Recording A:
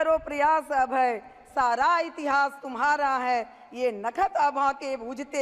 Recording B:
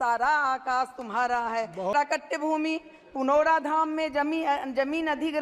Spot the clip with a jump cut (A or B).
B